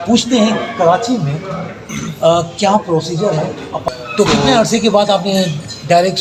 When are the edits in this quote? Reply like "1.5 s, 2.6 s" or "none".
3.8 s